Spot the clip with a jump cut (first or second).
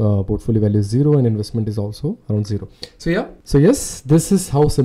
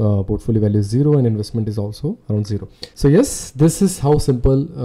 second